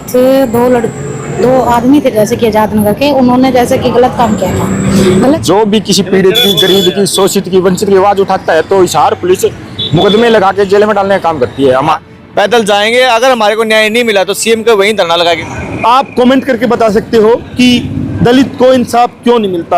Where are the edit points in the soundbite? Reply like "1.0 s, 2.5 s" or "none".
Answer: 5.4 s, 12.0 s, 15.5 s

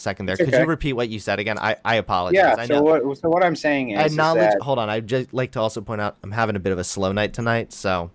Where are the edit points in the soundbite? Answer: none

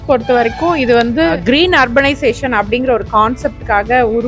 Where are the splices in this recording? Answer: 1.3 s

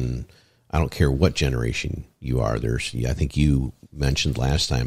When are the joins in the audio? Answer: none

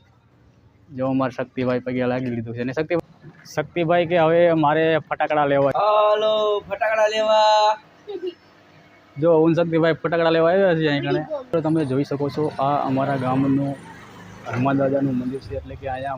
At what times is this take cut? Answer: 3.0 s, 5.7 s, 11.5 s

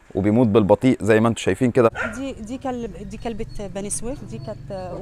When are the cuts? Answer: 1.7 s

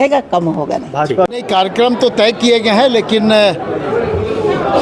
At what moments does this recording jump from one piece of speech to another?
none

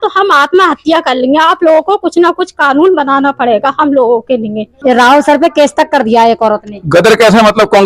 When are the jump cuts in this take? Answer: 4.6 s

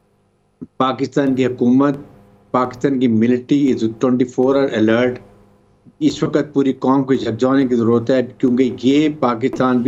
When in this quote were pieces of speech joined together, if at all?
none

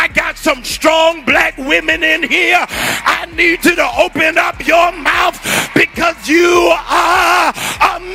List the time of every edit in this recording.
none

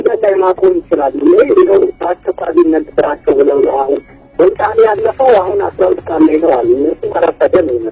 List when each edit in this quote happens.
6.3 s

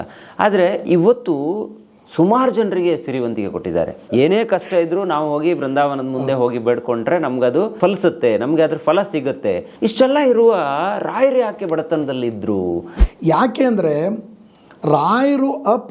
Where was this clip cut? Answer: 4.1 s, 7.7 s, 9.7 s, 12.9 s

